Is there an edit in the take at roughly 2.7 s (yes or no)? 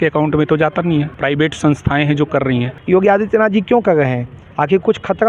yes